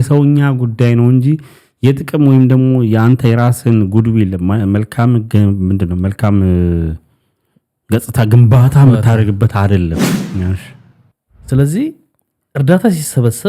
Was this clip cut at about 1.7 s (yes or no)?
no